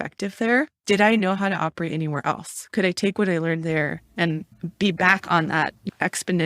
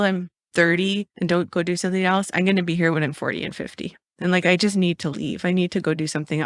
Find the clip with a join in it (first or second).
first